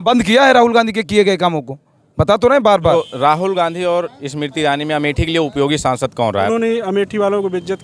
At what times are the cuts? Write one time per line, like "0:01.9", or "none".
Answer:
0:02.9
0:06.5

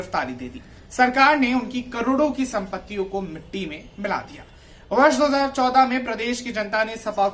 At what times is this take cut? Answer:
none

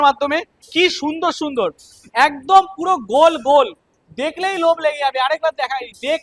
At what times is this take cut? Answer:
none

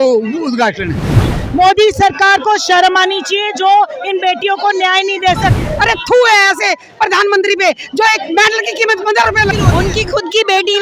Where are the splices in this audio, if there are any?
0:01.2
0:05.6
0:09.5

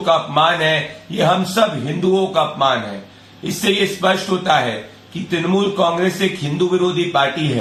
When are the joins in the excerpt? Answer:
none

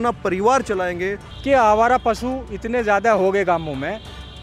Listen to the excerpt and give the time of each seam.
0:01.2

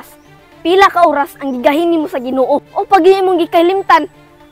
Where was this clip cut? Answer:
0:02.7

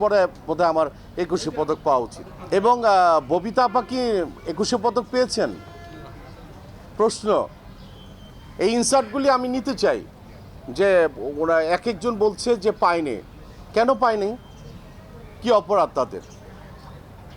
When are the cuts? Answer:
none

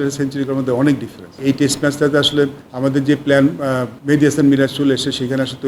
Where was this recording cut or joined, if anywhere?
0:01.3
0:02.6
0:03.9

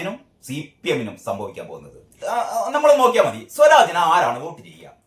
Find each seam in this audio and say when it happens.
0:02.2

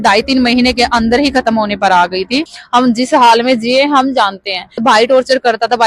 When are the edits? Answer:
0:02.6
0:04.8

